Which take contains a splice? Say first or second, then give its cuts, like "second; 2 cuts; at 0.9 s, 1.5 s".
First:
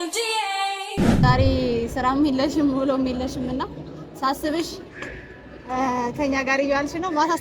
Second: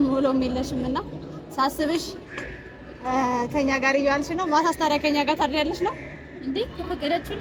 first; 1 cut; at 1.2 s